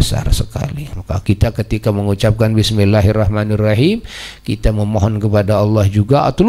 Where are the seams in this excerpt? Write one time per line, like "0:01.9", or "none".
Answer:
0:01.0